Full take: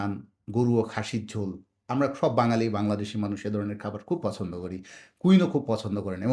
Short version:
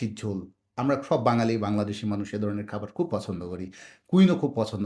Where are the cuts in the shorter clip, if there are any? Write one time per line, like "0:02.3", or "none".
none